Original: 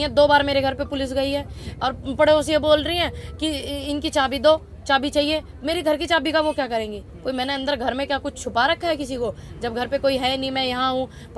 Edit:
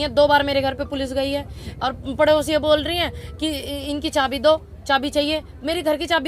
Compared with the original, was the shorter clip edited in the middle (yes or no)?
no